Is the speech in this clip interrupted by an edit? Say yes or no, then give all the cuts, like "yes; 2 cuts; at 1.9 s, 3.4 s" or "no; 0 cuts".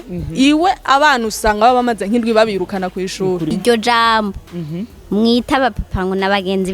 yes; 1 cut; at 3.5 s